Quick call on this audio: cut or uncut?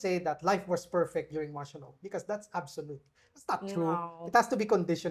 uncut